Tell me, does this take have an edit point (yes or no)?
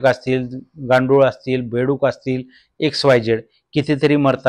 no